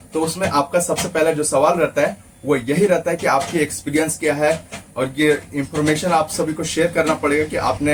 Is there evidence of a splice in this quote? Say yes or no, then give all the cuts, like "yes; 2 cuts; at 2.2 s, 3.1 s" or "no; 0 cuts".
no; 0 cuts